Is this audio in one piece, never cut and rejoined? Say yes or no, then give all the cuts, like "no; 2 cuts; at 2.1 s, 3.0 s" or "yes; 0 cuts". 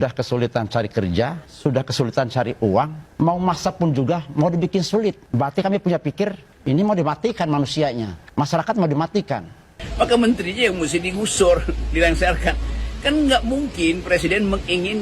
no; 6 cuts; at 1.4 s, 3.0 s, 5.2 s, 6.5 s, 8.2 s, 9.8 s